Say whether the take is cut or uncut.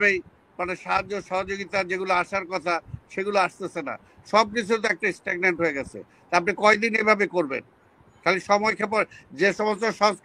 uncut